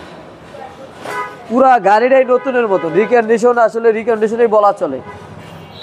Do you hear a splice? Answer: no; 0 cuts

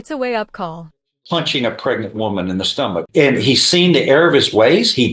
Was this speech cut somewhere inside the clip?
yes; 2 cuts; at 0.9 s, 3.0 s

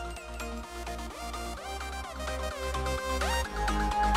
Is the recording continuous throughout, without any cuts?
yes; 0 cuts

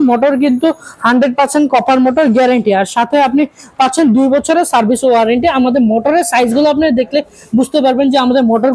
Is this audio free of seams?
yes; 0 cuts

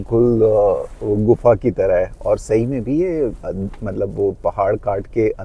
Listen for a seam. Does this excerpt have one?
no; 0 cuts

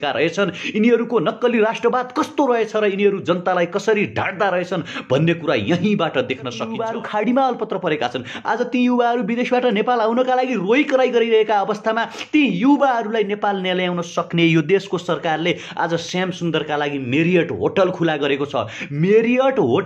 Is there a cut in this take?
yes; 1 cut; at 6.7 s

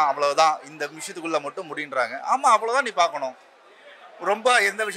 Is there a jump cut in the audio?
no; 0 cuts

